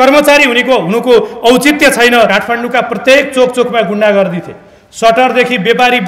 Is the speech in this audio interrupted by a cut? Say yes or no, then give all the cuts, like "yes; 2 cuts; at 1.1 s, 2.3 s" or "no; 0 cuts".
yes; 1 cut; at 2.3 s